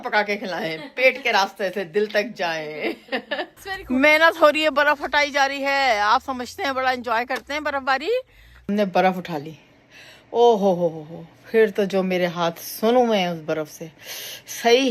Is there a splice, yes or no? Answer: yes